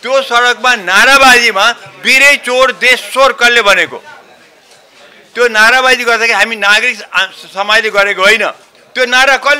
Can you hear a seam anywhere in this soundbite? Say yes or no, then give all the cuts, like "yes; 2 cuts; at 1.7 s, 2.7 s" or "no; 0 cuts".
no; 0 cuts